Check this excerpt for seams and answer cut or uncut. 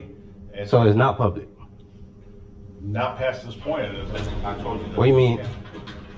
uncut